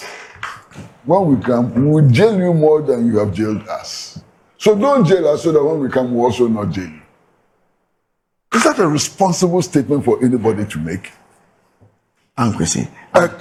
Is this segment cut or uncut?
uncut